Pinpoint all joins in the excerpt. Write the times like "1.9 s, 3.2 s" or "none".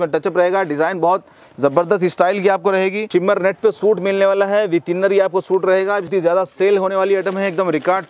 3.1 s, 6.1 s

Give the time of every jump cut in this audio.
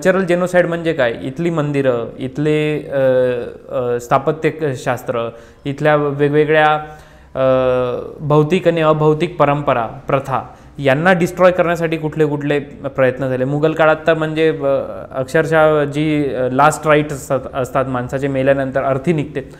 none

